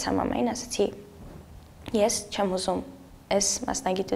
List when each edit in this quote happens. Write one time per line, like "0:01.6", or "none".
none